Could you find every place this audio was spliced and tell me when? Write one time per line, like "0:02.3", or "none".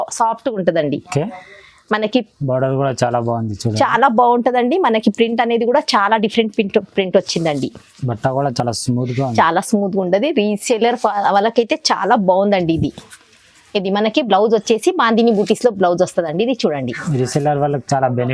none